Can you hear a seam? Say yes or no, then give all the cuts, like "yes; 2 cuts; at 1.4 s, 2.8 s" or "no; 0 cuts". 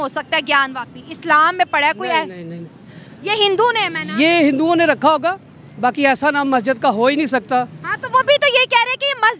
no; 0 cuts